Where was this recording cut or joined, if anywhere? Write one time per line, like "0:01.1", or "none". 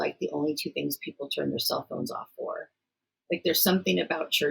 none